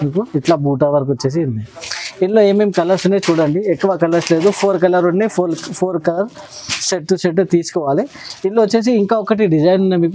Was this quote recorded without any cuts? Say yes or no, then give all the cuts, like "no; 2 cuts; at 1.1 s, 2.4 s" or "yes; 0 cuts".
yes; 0 cuts